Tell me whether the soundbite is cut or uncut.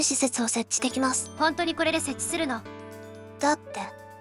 cut